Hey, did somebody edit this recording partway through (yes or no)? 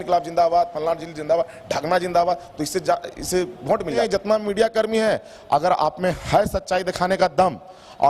yes